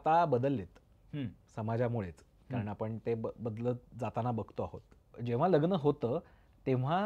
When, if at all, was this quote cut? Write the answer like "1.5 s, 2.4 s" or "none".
5.1 s